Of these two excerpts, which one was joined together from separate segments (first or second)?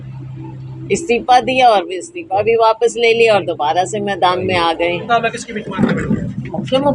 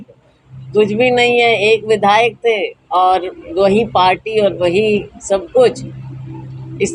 first